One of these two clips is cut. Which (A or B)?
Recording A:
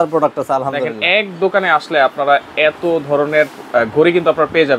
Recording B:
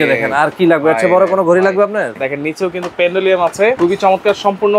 B